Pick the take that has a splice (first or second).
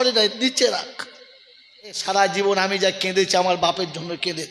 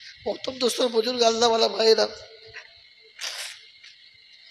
first